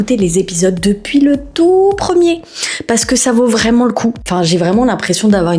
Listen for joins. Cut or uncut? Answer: cut